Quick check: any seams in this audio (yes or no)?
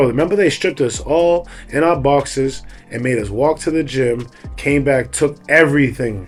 no